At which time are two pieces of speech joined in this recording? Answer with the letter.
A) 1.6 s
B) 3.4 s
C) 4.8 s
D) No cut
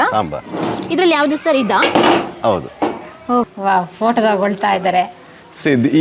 B